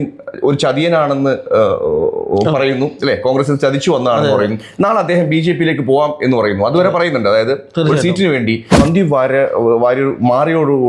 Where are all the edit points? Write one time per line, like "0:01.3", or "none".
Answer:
0:08.8